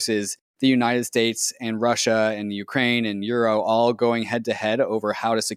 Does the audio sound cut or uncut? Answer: uncut